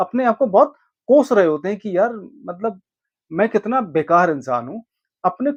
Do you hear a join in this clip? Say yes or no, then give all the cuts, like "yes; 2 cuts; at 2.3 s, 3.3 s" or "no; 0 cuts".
no; 0 cuts